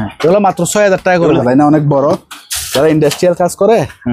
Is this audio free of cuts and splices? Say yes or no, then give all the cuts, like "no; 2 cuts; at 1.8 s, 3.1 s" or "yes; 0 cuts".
no; 1 cut; at 1.4 s